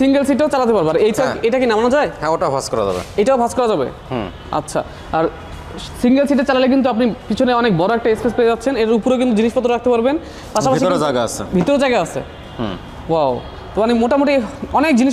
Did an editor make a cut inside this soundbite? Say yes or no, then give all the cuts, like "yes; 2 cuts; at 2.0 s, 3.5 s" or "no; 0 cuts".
no; 0 cuts